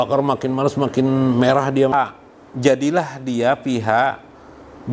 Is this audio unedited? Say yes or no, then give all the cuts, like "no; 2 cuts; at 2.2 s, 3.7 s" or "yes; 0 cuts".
no; 1 cut; at 1.9 s